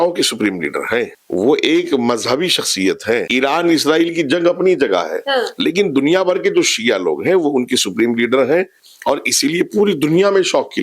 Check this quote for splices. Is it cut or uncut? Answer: cut